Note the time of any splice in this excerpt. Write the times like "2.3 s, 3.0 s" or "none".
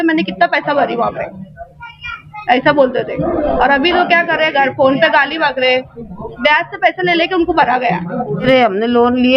8.4 s